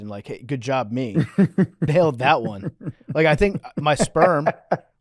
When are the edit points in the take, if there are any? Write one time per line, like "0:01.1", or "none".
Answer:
0:01.1